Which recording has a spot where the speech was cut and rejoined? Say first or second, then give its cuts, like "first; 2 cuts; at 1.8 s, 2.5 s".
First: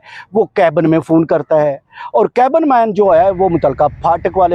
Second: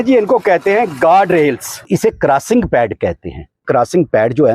second; 1 cut; at 1.9 s